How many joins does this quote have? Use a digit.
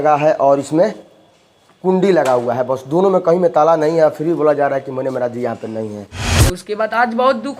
1